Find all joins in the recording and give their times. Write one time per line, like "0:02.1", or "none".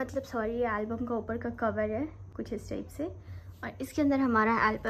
none